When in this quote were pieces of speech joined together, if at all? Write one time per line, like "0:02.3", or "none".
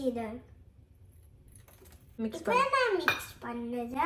0:02.1